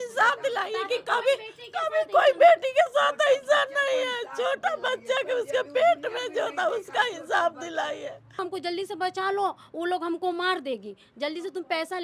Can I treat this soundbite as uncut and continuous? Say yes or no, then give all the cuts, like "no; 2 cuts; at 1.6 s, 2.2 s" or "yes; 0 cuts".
no; 1 cut; at 8.4 s